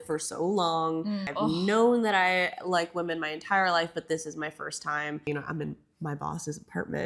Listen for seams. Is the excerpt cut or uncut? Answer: cut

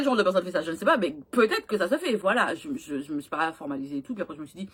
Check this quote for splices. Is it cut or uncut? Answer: uncut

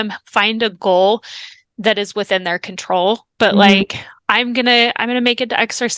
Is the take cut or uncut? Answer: cut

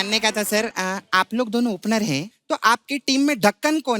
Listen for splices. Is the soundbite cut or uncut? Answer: cut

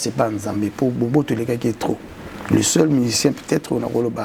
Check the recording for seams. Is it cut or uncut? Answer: uncut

